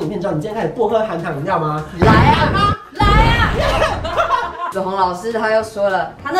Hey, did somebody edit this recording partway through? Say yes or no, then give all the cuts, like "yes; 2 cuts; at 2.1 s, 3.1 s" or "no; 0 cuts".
yes; 1 cut; at 4.7 s